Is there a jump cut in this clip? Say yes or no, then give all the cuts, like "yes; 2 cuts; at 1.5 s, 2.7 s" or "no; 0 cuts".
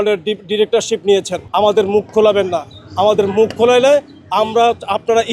yes; 1 cut; at 1.4 s